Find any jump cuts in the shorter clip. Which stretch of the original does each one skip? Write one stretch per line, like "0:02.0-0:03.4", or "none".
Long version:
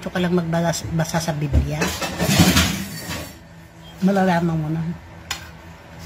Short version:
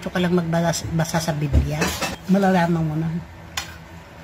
0:02.1-0:03.9